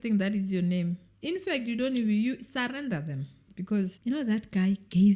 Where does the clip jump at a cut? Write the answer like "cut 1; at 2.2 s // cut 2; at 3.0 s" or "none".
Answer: cut 1; at 3.9 s

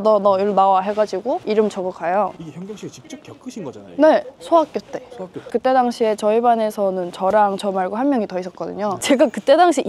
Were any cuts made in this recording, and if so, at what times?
cut 1; at 5.4 s // cut 2; at 9.0 s

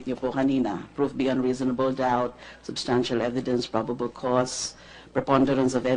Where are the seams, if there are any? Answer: cut 1; at 4.0 s

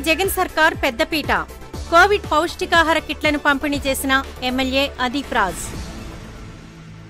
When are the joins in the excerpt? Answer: none

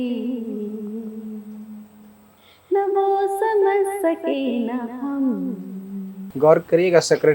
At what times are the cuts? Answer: cut 1; at 6.3 s

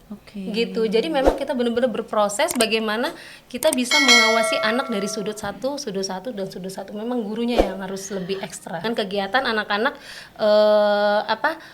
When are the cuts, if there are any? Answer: cut 1; at 8.8 s

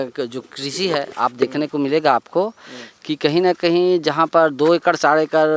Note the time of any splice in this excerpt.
none

